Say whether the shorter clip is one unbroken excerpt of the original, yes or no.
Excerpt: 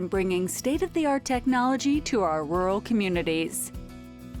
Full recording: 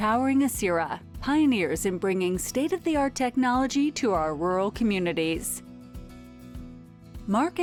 no